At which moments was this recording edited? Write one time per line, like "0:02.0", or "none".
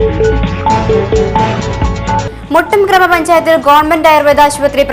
0:02.2